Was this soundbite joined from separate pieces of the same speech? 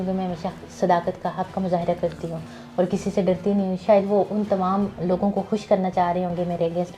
no; 0 cuts

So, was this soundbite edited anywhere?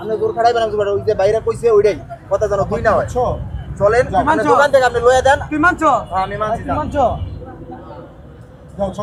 no; 0 cuts

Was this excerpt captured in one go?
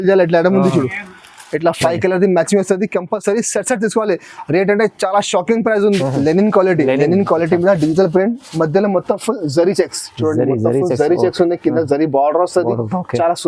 no; 1 cut; at 6.0 s

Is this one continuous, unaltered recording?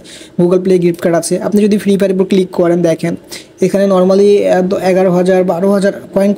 yes; 0 cuts

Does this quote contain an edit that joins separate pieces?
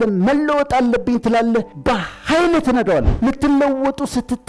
yes; 2 cuts; at 1.7 s, 3.1 s

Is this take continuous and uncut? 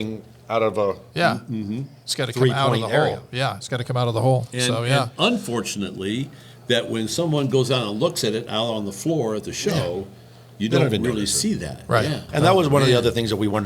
no; 1 cut; at 12.3 s

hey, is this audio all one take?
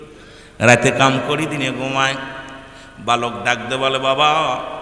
yes; 0 cuts

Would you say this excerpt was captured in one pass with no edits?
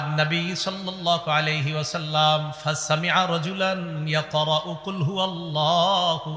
yes; 0 cuts

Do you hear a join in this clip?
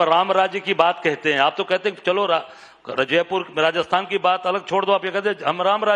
yes; 1 cut; at 3.3 s

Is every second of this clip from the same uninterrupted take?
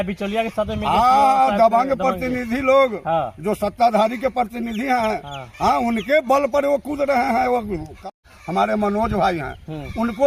no; 1 cut; at 8.0 s

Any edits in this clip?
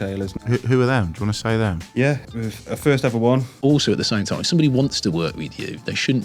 yes; 2 cuts; at 2.2 s, 3.6 s

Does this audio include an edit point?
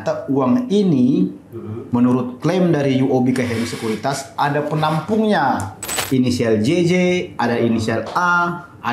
yes; 1 cut; at 5.9 s

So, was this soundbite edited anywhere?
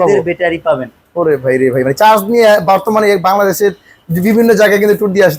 no; 0 cuts

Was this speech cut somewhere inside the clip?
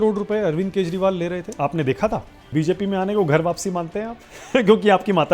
yes; 2 cuts; at 1.5 s, 2.4 s

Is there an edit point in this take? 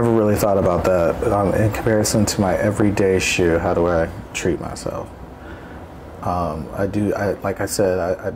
no; 0 cuts

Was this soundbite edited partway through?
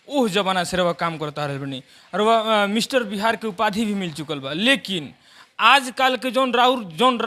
no; 0 cuts

